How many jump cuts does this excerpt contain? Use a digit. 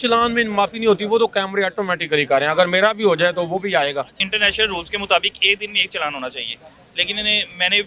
1